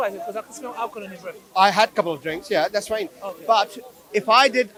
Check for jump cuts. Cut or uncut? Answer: uncut